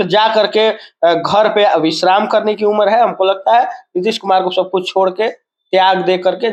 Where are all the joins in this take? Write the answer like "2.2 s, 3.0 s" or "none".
none